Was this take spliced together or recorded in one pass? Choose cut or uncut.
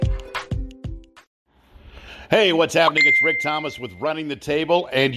cut